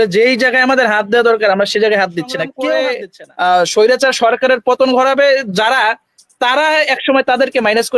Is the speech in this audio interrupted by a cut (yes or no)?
yes